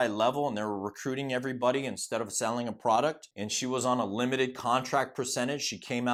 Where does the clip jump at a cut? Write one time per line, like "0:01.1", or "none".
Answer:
none